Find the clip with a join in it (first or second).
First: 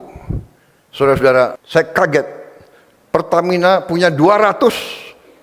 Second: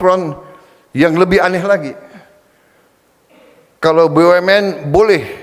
first